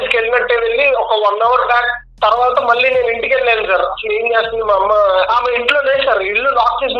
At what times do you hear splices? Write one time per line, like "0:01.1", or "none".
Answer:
0:05.3